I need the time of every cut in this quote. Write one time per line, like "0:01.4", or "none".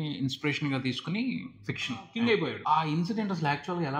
0:02.0